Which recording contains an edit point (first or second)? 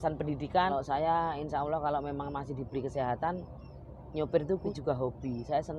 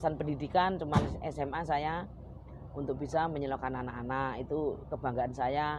first